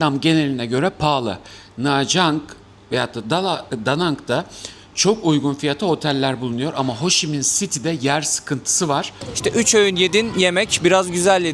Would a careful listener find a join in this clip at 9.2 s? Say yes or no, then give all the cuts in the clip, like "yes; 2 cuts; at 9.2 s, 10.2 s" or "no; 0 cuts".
yes; 1 cut; at 9.2 s